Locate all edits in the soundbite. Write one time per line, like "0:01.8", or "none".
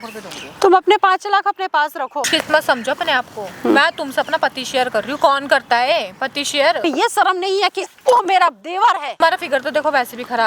0:02.3
0:06.8
0:09.1